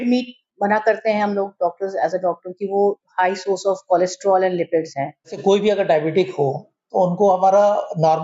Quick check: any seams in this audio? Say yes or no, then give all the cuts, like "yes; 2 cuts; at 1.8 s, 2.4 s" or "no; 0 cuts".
yes; 1 cut; at 5.4 s